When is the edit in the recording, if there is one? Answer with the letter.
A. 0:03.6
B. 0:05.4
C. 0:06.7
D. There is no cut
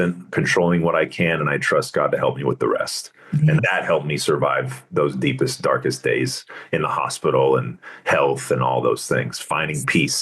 A